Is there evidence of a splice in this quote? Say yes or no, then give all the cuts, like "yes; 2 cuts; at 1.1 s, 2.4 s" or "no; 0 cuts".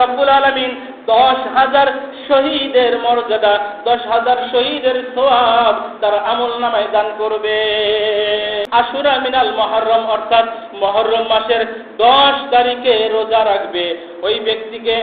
yes; 1 cut; at 8.7 s